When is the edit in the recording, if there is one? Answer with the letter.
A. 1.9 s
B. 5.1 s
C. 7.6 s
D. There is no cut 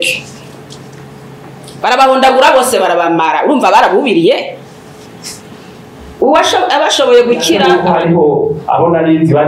C